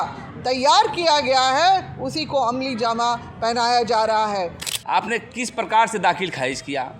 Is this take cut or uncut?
cut